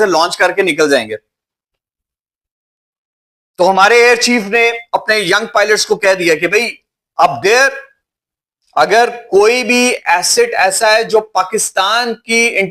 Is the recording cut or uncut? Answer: uncut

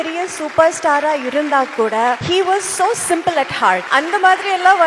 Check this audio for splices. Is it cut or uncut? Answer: cut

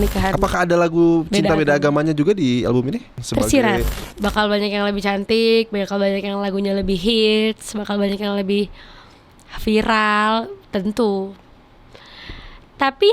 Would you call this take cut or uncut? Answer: cut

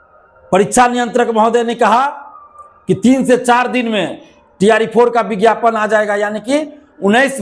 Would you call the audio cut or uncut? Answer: uncut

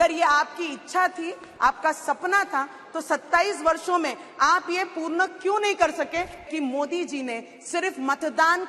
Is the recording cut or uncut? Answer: cut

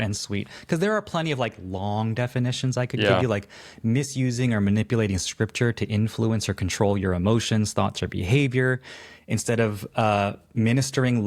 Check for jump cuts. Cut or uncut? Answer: uncut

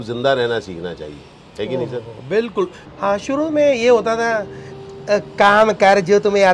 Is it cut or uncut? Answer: cut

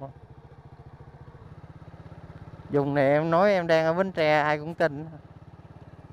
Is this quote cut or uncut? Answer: cut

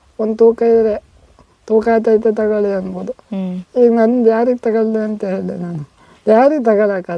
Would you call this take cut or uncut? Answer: uncut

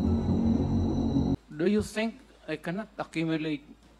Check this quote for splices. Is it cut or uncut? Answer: cut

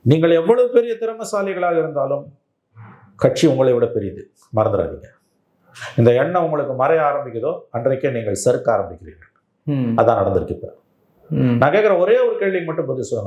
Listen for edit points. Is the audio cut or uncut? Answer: uncut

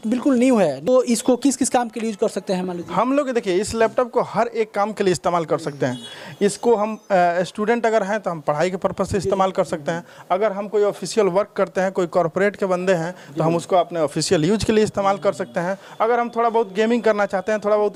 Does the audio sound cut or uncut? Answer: uncut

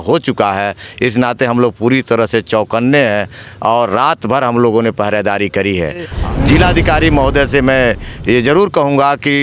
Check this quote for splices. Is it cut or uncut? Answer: cut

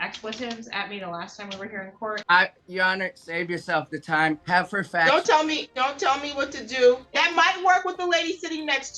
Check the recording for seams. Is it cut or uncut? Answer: cut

